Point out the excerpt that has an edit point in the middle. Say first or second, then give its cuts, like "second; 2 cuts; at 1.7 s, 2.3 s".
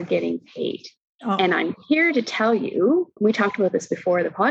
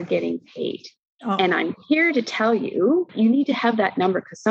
second; 1 cut; at 3.1 s